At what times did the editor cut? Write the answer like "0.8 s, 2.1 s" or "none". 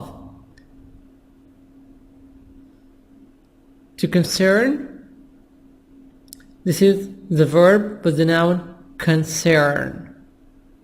7.5 s